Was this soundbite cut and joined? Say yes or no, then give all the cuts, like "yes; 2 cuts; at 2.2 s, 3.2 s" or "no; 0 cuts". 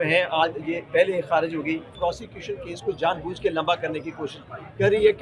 yes; 1 cut; at 1.9 s